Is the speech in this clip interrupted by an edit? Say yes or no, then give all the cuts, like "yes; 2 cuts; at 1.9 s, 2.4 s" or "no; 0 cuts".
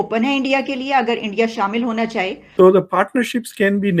yes; 1 cut; at 2.5 s